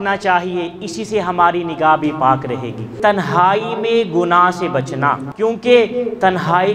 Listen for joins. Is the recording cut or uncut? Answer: cut